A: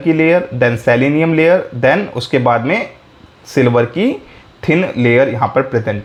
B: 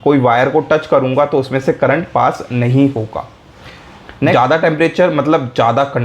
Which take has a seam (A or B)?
B